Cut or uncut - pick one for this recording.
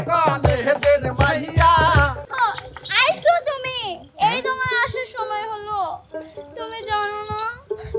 cut